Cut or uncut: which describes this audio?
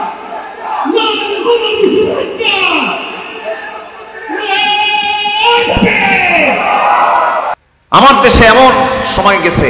cut